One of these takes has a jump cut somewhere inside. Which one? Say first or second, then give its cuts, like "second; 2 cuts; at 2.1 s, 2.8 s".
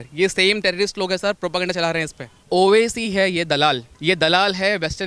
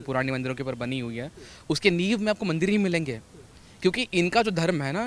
first; 2 cuts; at 2.4 s, 3.9 s